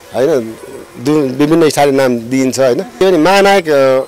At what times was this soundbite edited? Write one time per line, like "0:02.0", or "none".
0:03.0